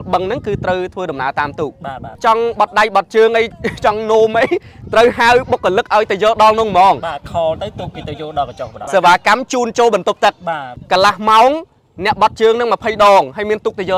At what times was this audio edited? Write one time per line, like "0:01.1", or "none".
0:02.2
0:08.8
0:10.7